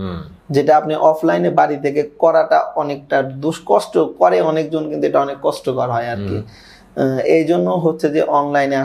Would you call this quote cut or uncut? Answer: uncut